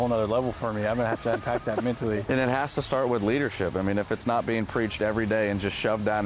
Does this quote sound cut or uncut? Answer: cut